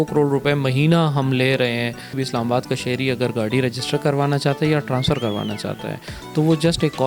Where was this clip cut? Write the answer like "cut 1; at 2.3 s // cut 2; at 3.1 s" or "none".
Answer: cut 1; at 2.2 s